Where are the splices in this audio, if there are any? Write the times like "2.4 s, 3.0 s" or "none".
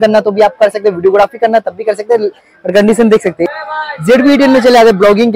3.5 s